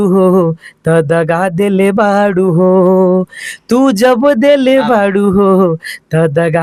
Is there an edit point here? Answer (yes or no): no